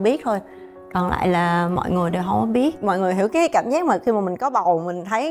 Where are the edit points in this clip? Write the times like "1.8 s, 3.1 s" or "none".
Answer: 2.8 s